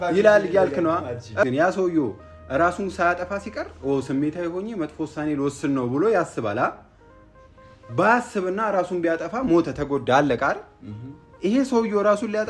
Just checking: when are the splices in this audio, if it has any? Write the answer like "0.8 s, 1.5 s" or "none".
1.5 s